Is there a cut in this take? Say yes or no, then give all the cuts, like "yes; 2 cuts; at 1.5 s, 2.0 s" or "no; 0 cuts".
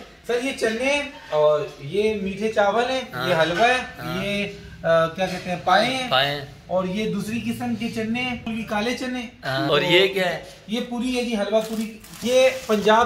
yes; 3 cuts; at 8.5 s, 9.7 s, 12.2 s